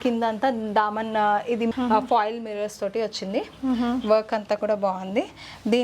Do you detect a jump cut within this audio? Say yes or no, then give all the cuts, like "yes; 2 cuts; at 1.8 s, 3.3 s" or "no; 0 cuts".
no; 0 cuts